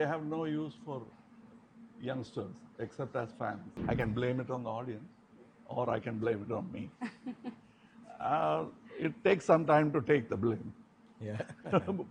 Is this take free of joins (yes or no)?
no